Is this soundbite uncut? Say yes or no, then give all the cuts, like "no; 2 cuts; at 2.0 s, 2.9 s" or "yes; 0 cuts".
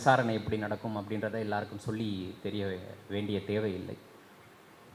yes; 0 cuts